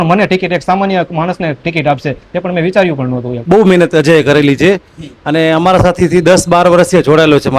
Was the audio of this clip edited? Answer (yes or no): yes